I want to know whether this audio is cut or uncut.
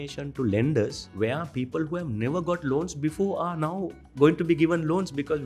cut